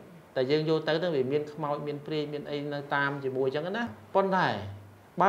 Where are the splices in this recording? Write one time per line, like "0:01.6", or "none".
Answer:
0:04.0